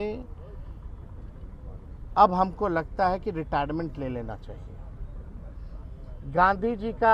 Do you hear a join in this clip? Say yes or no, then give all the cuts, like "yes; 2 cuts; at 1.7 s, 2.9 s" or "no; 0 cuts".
no; 0 cuts